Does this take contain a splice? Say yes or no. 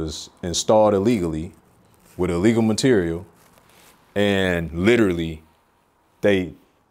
no